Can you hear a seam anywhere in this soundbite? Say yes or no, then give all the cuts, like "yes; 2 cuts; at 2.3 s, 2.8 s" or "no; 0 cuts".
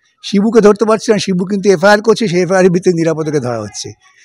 no; 0 cuts